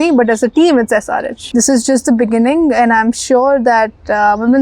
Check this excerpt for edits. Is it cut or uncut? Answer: cut